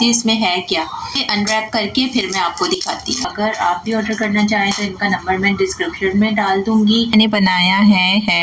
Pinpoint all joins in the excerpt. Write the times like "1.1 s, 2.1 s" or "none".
1.2 s, 3.3 s, 7.1 s